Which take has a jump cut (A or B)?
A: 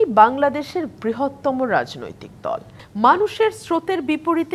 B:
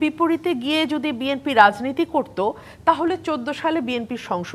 A